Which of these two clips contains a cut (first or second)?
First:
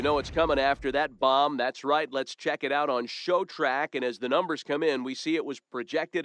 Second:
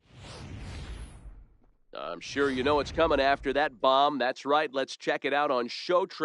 second